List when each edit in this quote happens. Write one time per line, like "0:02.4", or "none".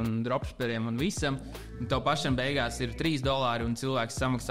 none

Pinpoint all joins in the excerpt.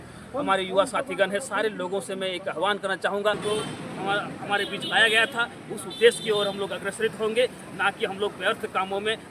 0:03.4

